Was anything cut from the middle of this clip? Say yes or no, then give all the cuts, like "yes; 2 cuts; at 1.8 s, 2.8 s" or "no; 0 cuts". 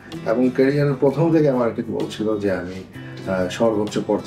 no; 0 cuts